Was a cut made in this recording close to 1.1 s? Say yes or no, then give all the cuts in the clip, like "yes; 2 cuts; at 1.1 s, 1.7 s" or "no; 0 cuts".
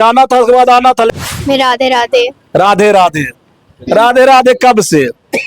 yes; 1 cut; at 1.1 s